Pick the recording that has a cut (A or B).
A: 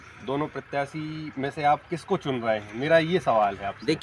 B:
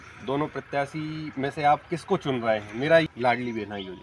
B